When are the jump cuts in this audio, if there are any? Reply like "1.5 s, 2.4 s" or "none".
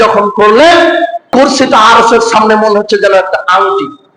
1.3 s